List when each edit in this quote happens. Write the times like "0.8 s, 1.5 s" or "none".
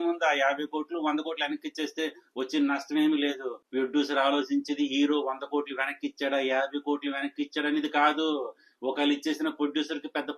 3.5 s